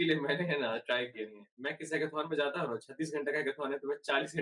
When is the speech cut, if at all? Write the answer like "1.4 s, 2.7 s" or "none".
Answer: 1.6 s

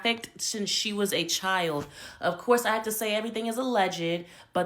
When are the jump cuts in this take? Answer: none

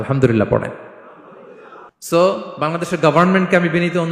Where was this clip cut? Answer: 1.9 s

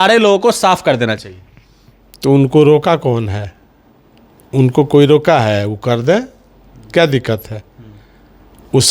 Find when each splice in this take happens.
none

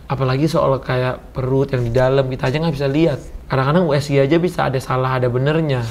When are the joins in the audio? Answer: none

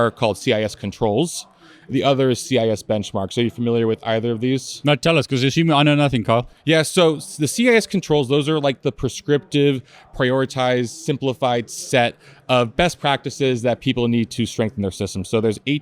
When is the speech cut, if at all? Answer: none

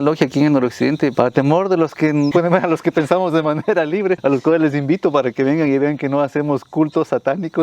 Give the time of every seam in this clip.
1.1 s, 2.3 s, 4.2 s

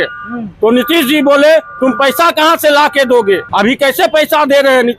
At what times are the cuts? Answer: 3.5 s

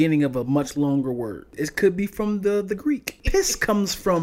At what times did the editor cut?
1.5 s, 3.1 s

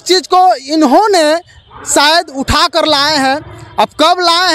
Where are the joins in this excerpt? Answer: none

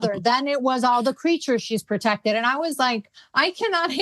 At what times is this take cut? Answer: none

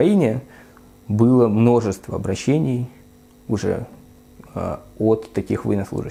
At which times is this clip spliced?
none

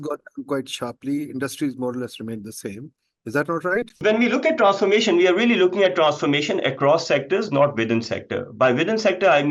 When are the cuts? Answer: 3.9 s

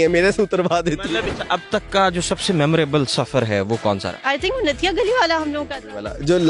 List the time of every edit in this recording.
1.3 s, 4.1 s

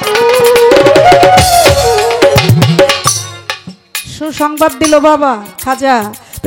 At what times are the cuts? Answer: none

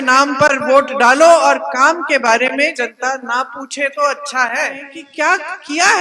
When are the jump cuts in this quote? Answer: 5.0 s

